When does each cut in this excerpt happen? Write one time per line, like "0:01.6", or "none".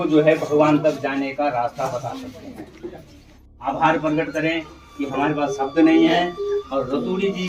none